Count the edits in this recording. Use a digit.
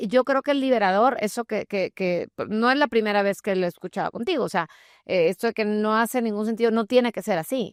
0